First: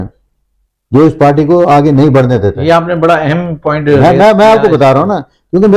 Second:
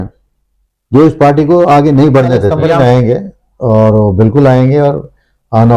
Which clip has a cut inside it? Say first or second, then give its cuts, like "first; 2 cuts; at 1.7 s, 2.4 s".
second; 1 cut; at 2.6 s